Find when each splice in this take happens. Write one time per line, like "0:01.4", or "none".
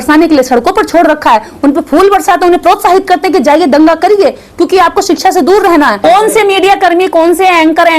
0:06.0